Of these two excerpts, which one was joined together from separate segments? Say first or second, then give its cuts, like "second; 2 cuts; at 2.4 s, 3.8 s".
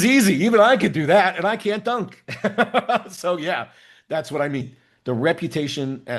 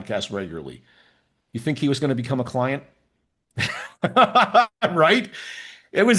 first; 1 cut; at 4.7 s